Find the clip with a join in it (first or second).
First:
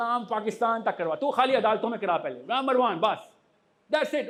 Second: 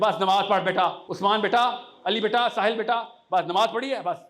second